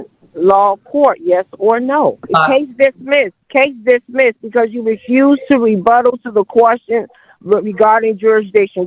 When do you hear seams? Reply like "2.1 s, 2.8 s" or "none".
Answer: 2.2 s, 3.4 s